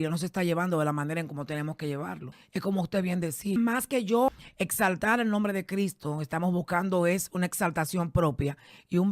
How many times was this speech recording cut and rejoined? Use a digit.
3